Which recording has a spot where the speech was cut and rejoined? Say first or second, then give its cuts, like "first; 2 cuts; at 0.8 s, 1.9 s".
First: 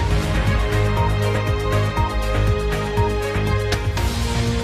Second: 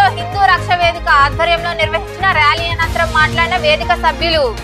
first; 1 cut; at 3.8 s